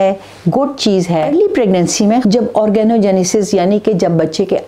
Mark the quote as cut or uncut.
cut